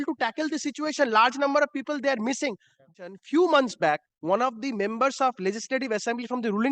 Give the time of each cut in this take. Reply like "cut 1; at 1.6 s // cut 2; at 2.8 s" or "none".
cut 1; at 3.2 s